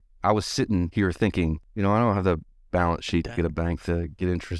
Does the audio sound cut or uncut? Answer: cut